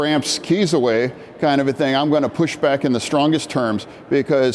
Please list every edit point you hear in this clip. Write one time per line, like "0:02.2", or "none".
none